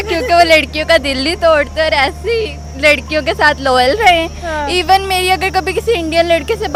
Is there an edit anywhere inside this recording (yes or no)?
no